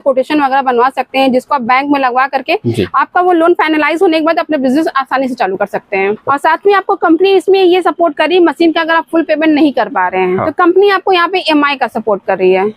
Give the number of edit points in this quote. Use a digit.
2